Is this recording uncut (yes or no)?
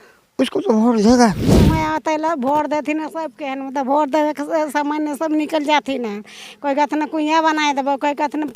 no